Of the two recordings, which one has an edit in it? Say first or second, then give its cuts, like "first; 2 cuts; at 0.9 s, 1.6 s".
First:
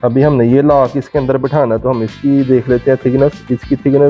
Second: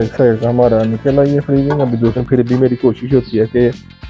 second; 1 cut; at 2.2 s